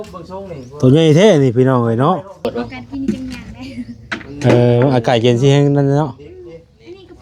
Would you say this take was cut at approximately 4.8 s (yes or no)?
no